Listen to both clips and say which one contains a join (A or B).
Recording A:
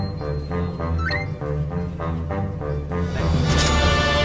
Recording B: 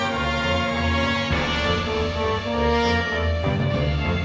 A